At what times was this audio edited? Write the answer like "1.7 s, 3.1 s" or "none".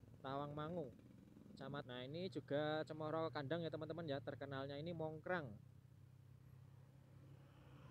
1.8 s